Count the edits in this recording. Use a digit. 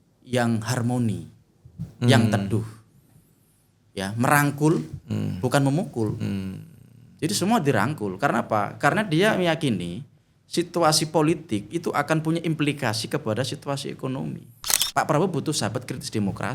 1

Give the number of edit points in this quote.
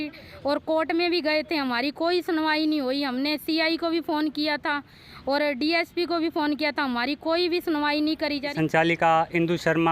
1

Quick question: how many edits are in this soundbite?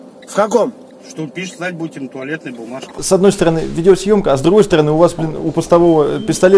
2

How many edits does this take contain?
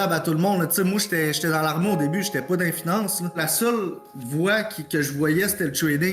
1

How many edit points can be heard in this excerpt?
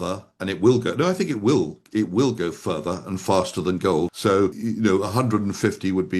1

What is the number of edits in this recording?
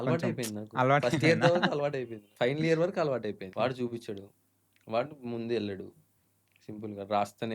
2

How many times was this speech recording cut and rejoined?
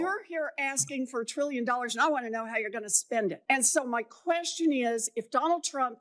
1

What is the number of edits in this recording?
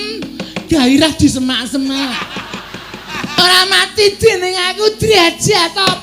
1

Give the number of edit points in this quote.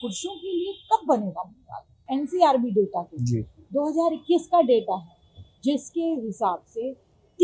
1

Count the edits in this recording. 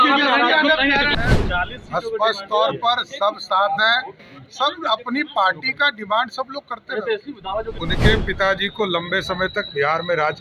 2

